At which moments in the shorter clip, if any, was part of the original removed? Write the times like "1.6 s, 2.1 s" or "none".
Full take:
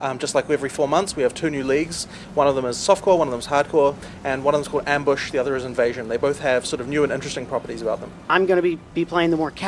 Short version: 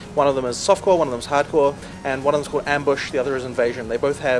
none